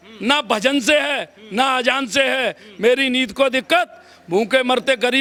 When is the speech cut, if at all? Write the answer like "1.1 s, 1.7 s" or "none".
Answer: none